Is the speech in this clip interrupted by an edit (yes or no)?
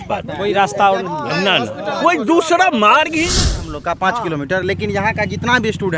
yes